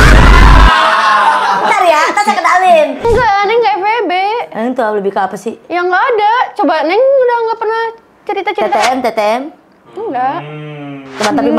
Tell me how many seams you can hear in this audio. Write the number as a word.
one